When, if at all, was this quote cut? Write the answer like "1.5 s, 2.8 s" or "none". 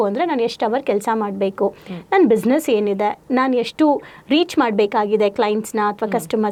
none

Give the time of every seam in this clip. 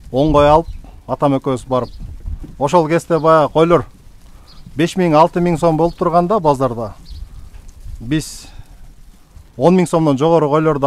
none

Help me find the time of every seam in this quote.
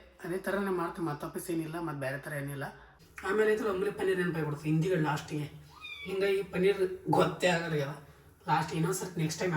2.9 s

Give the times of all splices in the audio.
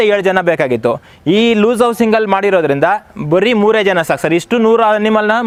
none

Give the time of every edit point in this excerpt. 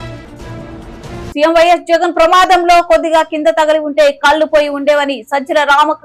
1.3 s

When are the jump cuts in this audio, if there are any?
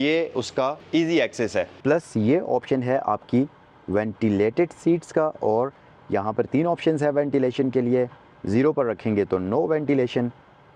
0.8 s, 1.7 s

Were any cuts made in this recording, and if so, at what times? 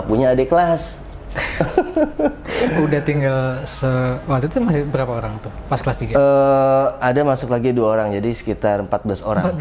none

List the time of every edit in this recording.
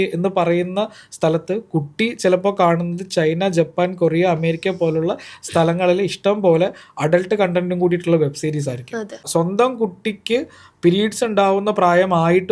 9.3 s

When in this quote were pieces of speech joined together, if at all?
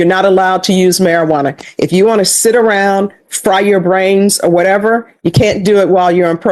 none

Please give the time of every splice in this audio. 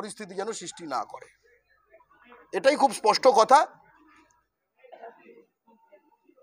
none

